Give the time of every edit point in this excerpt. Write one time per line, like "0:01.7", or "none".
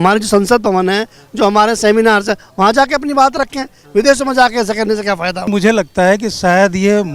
0:05.5